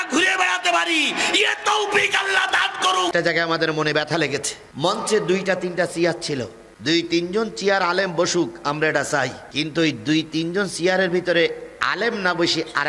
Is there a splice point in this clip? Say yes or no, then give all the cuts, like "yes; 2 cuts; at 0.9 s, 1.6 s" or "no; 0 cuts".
yes; 2 cuts; at 3.1 s, 9.4 s